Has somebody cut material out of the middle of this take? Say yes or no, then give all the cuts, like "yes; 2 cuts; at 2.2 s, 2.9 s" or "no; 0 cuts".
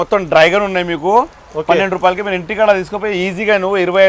no; 0 cuts